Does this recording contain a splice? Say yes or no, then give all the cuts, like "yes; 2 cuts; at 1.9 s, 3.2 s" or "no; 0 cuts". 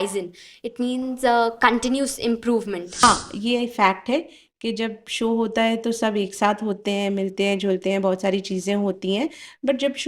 yes; 1 cut; at 3.0 s